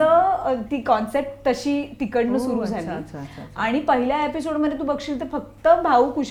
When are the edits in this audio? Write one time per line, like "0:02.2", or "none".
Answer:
none

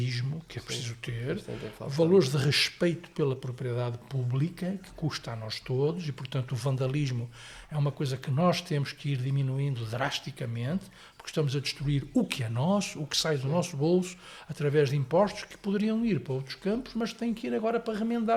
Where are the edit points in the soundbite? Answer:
none

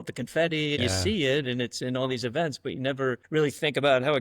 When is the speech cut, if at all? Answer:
0:00.8
0:03.2

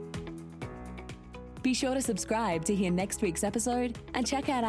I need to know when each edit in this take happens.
0:01.5

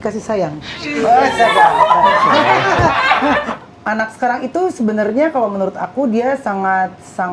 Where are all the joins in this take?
0:03.6

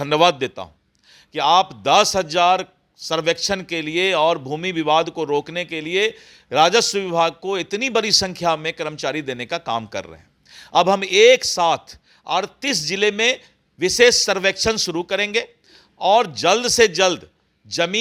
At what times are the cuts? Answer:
none

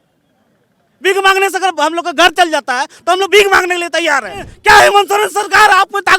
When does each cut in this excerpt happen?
0:04.5

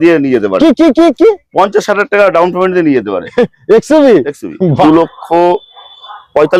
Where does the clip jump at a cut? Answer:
0:04.8

